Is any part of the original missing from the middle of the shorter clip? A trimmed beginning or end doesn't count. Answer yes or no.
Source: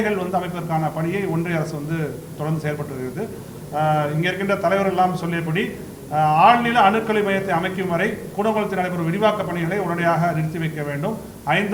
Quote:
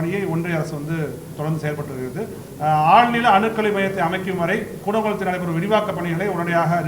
yes